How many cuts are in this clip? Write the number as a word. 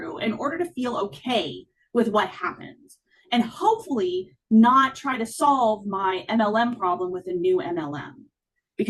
zero